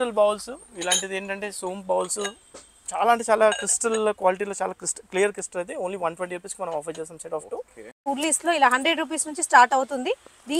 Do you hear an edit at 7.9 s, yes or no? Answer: yes